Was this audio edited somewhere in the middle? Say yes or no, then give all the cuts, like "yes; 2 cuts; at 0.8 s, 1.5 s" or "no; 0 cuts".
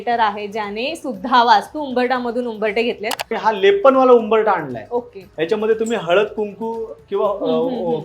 yes; 1 cut; at 3.3 s